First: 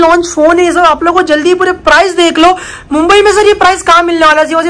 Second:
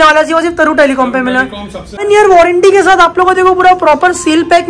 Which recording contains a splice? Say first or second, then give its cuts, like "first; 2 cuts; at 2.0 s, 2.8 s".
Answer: second; 1 cut; at 2.0 s